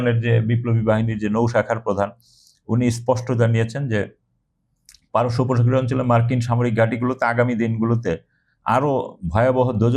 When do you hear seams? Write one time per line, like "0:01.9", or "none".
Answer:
none